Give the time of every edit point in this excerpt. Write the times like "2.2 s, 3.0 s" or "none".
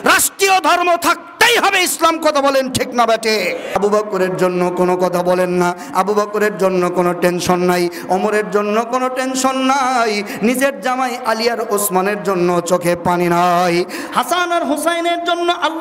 3.7 s